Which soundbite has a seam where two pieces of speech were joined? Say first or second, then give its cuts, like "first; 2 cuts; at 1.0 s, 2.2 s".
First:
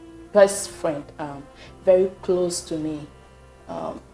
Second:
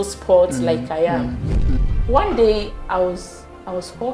second; 1 cut; at 1.6 s